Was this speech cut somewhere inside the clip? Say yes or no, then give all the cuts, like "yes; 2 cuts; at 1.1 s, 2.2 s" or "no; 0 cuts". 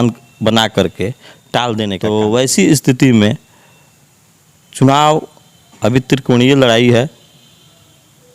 yes; 1 cut; at 2.0 s